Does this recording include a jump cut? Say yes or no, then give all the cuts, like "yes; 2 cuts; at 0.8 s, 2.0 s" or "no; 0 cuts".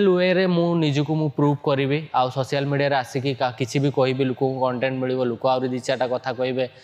no; 0 cuts